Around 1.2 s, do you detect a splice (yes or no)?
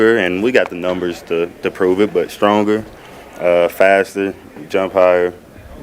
no